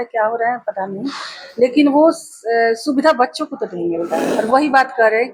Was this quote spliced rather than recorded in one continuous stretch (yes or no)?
yes